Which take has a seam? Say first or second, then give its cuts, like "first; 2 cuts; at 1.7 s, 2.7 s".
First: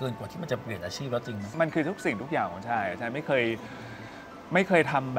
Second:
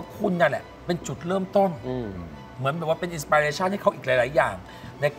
first; 1 cut; at 1.5 s